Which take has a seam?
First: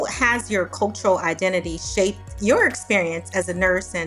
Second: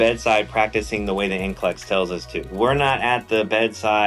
second; 1 cut; at 2.6 s

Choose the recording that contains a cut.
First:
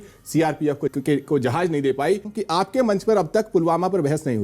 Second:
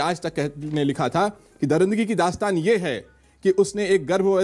first; 2 cuts; at 0.9 s, 2.3 s

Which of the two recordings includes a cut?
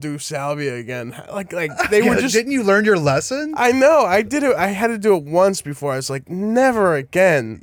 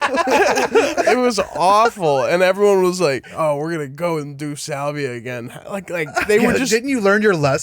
second; 2 cuts; at 0.9 s, 3.3 s

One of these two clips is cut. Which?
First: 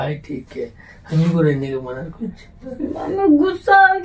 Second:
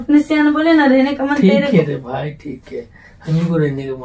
first; 1 cut; at 2.8 s

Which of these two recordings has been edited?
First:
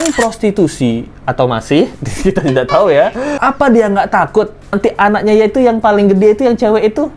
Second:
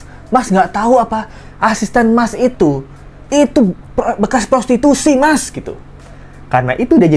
first; 1 cut; at 3.3 s

